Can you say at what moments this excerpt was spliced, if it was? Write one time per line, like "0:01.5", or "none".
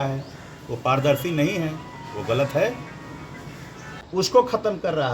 0:03.8